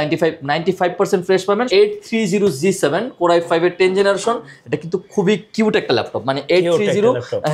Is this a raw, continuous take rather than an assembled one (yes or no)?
no